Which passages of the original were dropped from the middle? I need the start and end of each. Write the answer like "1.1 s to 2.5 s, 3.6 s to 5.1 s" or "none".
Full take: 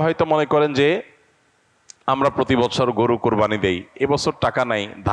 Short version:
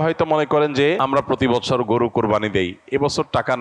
1.0 s to 2.1 s